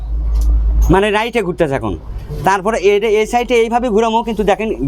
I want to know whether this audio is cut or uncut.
uncut